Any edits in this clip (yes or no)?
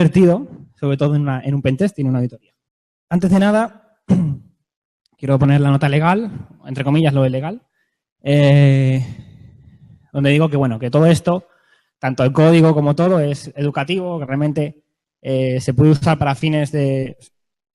yes